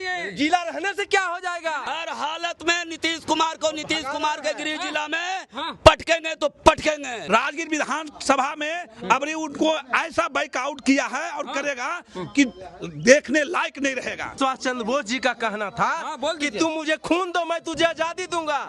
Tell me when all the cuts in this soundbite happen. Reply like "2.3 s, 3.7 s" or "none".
1.8 s, 7.1 s, 14.3 s